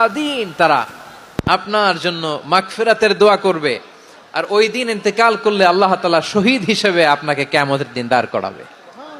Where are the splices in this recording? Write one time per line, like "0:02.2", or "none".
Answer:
none